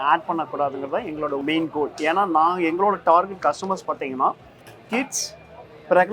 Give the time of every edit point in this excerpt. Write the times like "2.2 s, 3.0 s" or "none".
none

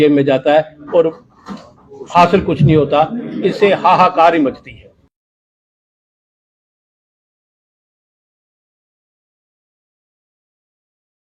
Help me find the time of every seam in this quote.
none

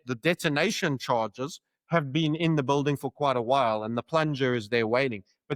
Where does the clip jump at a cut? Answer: none

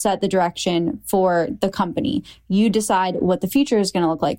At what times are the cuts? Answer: none

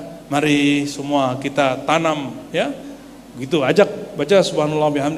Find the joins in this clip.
none

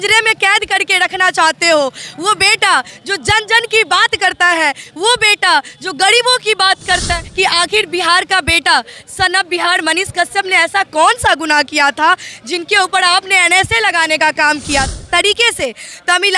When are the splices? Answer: 7.2 s, 14.9 s

